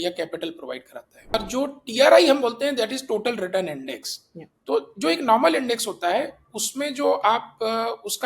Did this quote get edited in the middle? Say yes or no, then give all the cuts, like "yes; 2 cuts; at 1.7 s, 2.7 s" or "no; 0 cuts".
yes; 1 cut; at 1.3 s